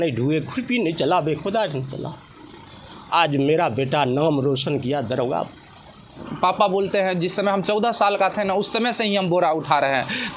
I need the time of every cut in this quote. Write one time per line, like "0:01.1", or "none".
0:06.1